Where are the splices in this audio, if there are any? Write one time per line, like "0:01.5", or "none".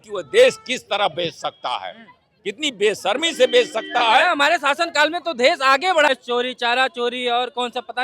0:06.1

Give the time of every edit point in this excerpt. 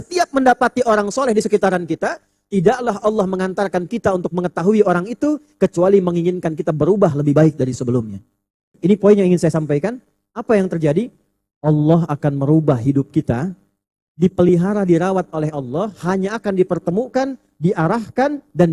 0:08.8

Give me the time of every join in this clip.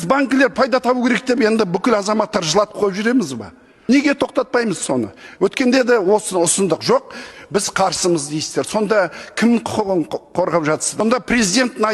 0:03.7
0:11.0

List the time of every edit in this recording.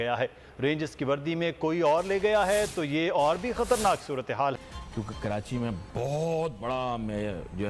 0:04.7

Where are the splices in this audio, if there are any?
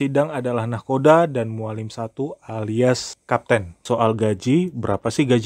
0:03.7

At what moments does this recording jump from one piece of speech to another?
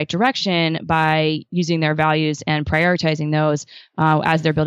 none

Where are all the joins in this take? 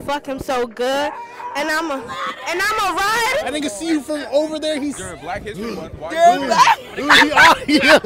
0:03.4

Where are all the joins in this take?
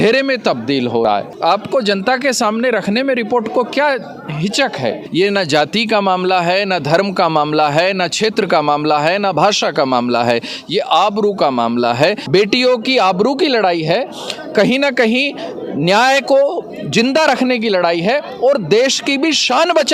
0:01.3
0:05.0
0:12.2

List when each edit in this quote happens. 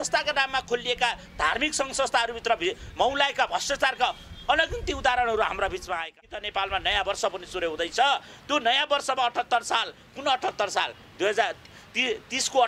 0:06.2

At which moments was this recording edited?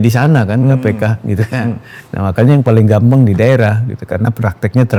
none

